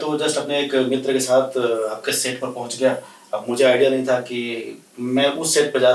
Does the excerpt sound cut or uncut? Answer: uncut